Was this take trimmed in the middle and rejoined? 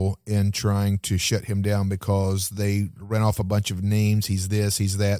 no; 0 cuts

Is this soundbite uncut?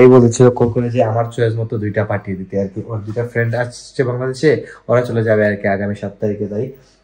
yes; 0 cuts

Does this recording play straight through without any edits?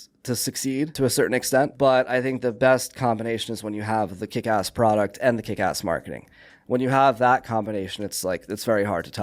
no; 1 cut; at 1.7 s

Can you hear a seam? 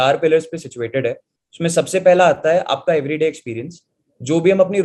no; 0 cuts

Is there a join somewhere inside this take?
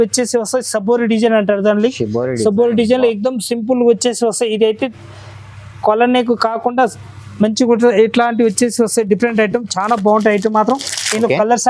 no; 0 cuts

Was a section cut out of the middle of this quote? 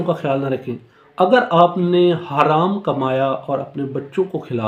no; 0 cuts

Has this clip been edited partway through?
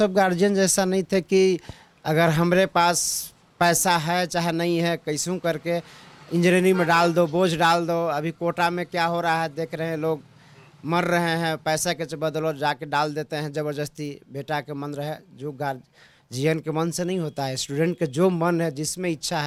no; 0 cuts

